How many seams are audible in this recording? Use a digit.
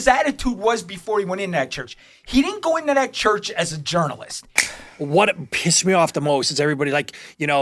1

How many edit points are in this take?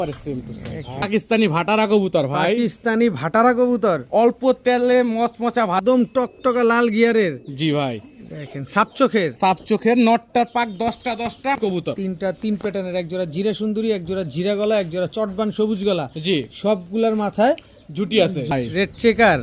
4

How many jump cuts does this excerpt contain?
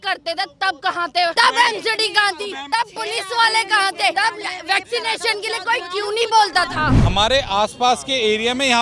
4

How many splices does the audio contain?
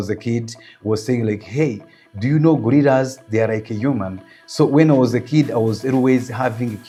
0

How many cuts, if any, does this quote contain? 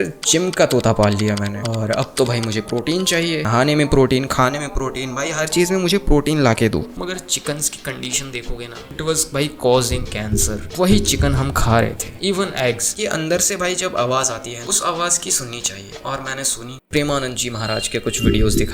3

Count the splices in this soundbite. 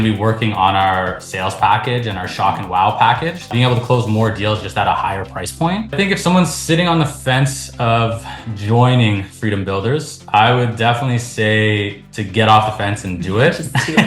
2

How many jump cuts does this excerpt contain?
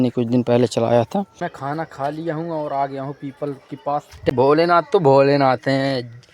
2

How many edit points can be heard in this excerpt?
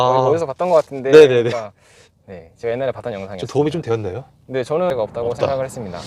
1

